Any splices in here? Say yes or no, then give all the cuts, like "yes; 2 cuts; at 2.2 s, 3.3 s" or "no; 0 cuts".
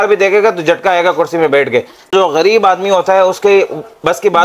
yes; 1 cut; at 2.1 s